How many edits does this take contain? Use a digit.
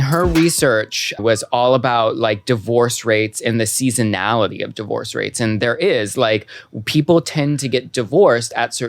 1